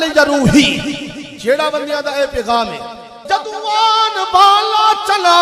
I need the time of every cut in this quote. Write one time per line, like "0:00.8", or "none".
0:03.2